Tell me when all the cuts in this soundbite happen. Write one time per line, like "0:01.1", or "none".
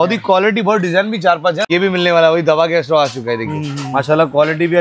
0:01.6